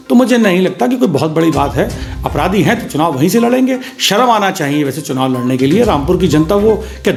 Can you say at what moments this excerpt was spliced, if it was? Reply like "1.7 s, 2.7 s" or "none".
none